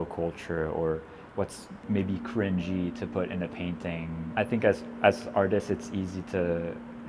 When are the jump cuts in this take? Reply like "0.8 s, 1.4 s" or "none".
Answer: 1.7 s, 4.2 s